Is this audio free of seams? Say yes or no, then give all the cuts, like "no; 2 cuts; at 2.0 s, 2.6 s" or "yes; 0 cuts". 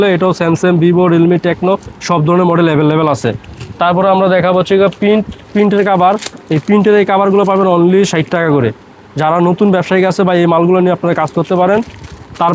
yes; 0 cuts